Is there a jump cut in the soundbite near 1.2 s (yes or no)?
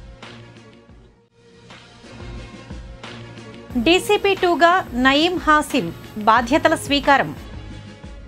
yes